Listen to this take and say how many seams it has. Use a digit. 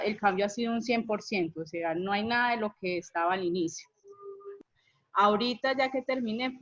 1